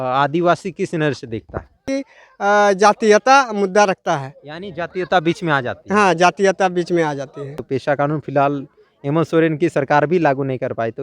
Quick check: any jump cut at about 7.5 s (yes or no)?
yes